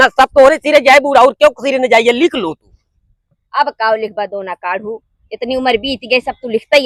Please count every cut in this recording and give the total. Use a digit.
0